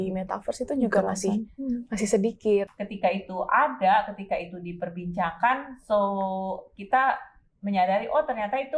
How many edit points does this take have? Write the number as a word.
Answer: one